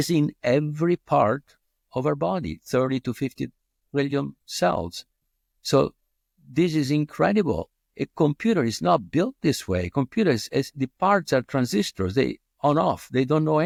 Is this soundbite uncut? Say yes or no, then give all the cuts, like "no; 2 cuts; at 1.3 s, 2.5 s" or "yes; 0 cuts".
yes; 0 cuts